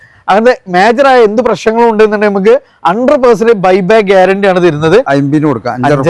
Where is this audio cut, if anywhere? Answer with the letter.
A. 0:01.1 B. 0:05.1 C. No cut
B